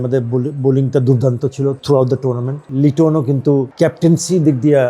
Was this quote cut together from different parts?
yes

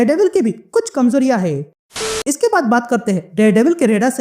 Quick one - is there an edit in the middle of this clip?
yes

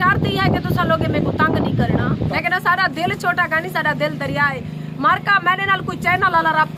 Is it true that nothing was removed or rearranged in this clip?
yes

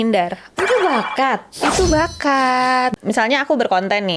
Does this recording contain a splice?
yes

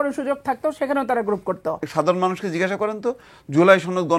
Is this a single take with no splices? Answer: no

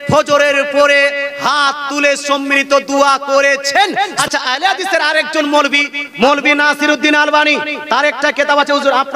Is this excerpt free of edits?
no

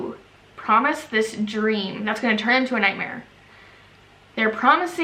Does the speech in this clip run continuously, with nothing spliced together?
yes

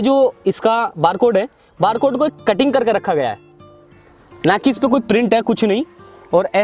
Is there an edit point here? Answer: no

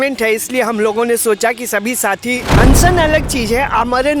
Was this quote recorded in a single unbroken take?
no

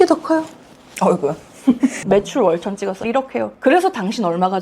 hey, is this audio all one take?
no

